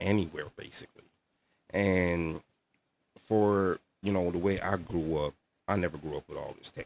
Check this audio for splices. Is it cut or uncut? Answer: uncut